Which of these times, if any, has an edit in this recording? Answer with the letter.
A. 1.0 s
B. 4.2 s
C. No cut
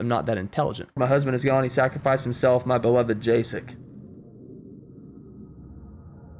A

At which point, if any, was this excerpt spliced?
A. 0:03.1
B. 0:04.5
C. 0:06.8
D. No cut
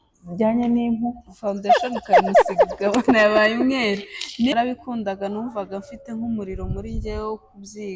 B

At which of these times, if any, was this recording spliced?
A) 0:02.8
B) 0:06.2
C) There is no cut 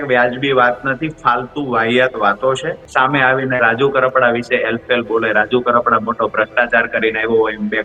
A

